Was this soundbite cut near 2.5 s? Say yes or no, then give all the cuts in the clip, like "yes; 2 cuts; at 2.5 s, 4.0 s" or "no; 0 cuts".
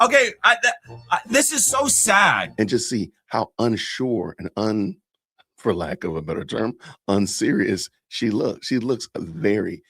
yes; 1 cut; at 2.5 s